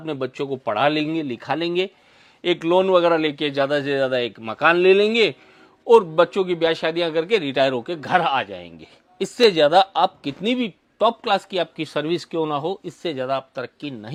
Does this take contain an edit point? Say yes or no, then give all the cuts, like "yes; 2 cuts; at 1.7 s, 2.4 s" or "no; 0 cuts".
no; 0 cuts